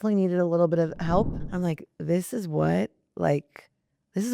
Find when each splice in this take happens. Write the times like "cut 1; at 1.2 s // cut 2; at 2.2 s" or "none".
cut 1; at 1.4 s